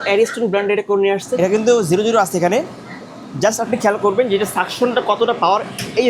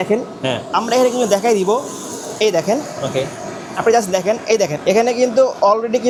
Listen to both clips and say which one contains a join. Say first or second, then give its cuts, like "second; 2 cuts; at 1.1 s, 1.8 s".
first; 1 cut; at 1.3 s